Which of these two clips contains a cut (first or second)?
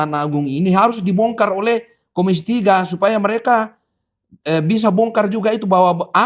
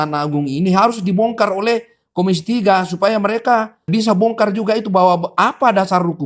second